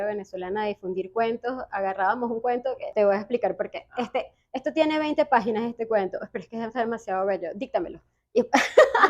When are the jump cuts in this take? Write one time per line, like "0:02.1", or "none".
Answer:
0:02.9